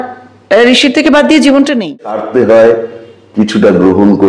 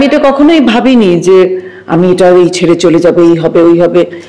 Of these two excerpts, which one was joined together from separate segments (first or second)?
first